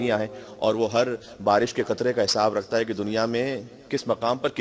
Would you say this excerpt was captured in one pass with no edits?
yes; 0 cuts

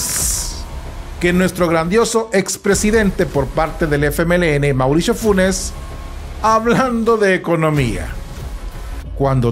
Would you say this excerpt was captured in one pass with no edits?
yes; 0 cuts

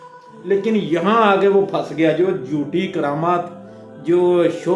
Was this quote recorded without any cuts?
yes; 0 cuts

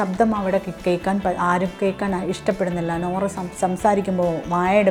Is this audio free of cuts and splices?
yes; 0 cuts

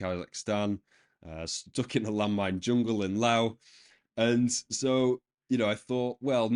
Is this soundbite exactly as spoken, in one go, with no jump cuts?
yes; 0 cuts

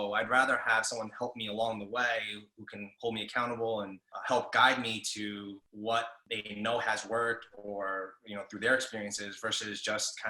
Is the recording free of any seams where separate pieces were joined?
no; 2 cuts; at 4.1 s, 5.9 s

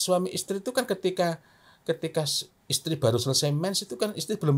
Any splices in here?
no; 0 cuts

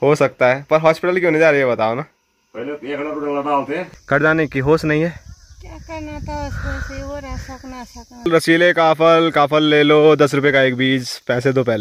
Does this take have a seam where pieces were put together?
yes; 2 cuts; at 3.9 s, 8.3 s

